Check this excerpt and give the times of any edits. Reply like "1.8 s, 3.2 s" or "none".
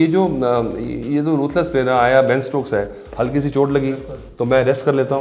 none